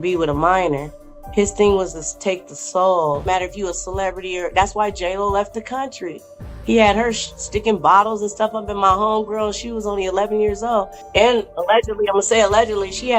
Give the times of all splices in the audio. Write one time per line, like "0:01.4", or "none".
0:03.2
0:11.0